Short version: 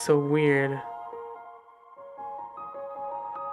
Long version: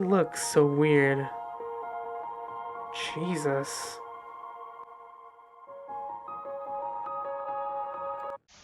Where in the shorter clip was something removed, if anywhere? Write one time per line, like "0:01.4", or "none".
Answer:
0:01.4